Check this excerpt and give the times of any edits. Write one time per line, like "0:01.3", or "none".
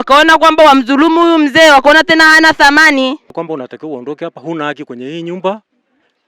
0:03.4